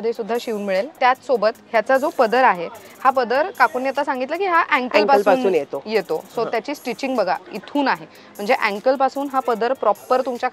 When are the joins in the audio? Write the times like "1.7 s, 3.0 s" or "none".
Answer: 0.9 s